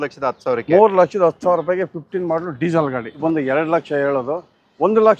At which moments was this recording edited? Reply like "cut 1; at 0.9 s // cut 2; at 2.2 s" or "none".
cut 1; at 3.2 s